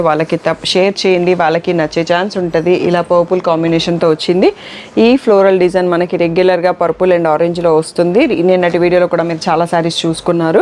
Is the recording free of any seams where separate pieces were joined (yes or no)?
yes